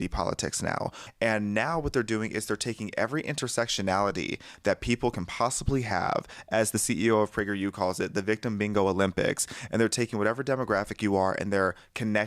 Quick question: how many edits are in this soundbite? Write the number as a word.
one